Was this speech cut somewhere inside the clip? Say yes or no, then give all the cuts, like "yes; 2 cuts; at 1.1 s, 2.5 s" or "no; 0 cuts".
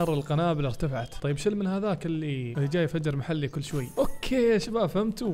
yes; 3 cuts; at 1.1 s, 2.5 s, 3.8 s